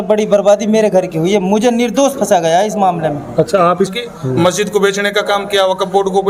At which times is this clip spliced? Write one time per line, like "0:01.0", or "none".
0:03.9